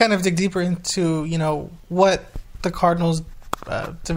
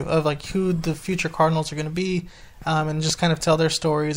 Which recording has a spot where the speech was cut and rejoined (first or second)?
first